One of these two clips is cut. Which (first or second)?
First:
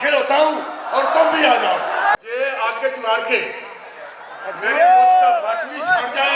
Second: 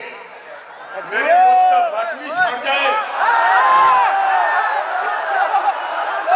first